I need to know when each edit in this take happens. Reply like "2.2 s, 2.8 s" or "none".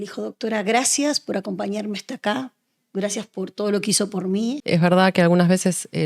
4.6 s